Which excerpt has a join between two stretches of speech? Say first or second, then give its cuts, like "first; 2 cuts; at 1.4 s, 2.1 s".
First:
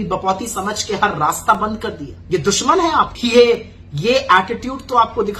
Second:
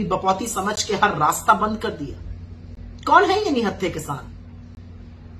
first; 2 cuts; at 2.1 s, 3.1 s